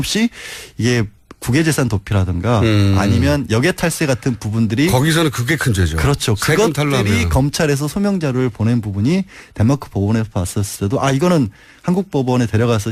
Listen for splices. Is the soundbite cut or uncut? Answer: uncut